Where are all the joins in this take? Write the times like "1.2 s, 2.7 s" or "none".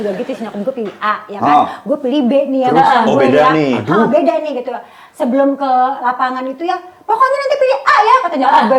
none